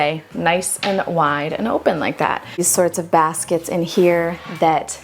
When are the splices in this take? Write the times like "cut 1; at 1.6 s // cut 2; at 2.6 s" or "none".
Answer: cut 1; at 2.7 s